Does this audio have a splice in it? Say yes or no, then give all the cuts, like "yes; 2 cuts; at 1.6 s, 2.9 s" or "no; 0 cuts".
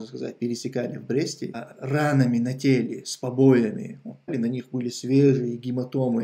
yes; 2 cuts; at 1.6 s, 4.3 s